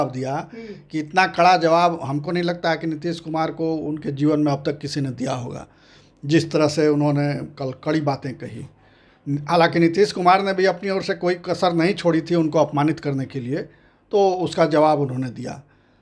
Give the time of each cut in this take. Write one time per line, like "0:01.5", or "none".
none

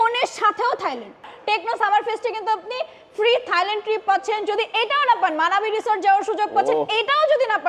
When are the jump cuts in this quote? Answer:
0:01.2

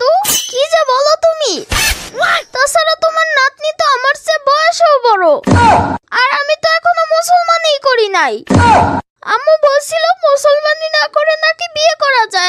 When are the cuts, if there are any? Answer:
none

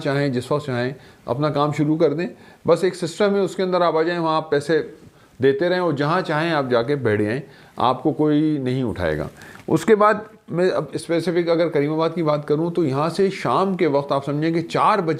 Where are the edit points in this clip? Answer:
none

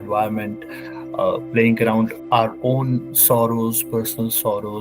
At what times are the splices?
0:02.2

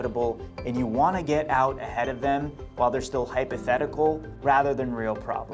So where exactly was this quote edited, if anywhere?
0:04.3

